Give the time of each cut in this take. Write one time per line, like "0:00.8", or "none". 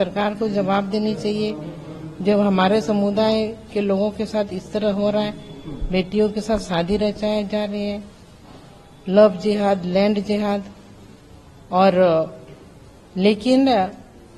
none